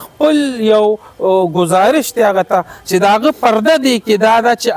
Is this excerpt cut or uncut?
uncut